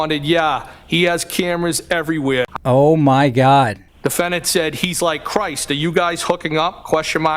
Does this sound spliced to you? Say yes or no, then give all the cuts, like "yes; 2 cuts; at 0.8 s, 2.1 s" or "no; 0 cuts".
yes; 2 cuts; at 2.5 s, 3.8 s